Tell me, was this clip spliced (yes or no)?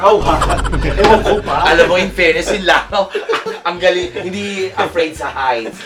no